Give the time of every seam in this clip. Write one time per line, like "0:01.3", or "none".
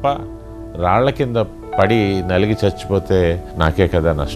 0:03.5